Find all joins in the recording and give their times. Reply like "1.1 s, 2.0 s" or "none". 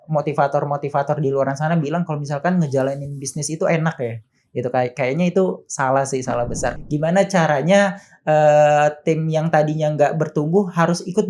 6.8 s